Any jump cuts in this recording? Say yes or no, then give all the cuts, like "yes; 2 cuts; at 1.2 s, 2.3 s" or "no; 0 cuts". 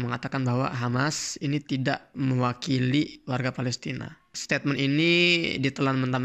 yes; 2 cuts; at 2.1 s, 4.4 s